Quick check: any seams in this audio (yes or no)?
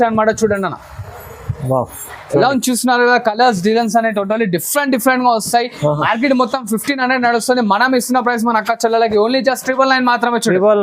no